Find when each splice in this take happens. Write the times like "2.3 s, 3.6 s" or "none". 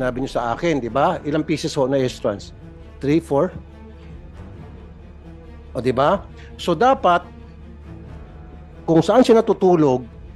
7.3 s, 8.8 s